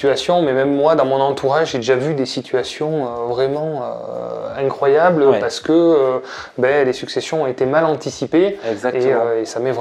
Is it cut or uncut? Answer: uncut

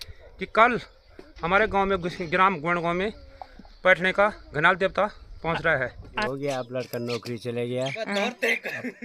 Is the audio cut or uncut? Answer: cut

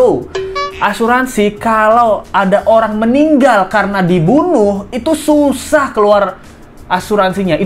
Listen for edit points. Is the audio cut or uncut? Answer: uncut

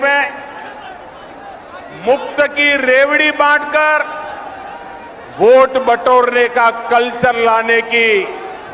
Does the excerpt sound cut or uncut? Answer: uncut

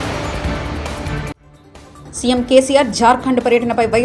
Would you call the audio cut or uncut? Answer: cut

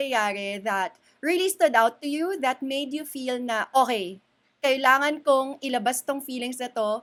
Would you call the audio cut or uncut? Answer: uncut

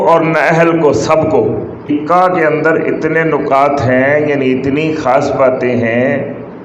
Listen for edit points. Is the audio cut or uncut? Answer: cut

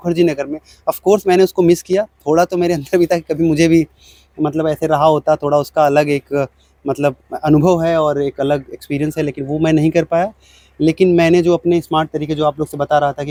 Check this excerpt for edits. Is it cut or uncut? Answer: uncut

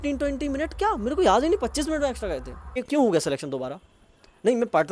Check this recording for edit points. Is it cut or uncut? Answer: cut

